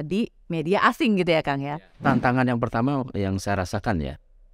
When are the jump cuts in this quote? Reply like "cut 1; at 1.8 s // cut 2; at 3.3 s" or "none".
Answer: cut 1; at 2.0 s